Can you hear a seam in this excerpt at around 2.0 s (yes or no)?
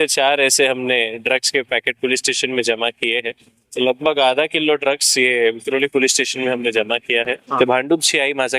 no